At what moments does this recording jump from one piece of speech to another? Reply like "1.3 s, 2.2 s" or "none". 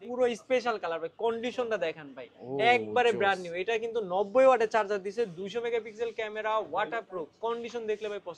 none